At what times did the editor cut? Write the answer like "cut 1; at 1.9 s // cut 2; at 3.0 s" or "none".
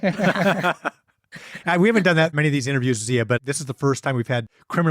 cut 1; at 2.3 s // cut 2; at 3.4 s